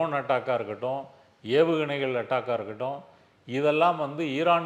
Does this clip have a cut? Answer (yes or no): no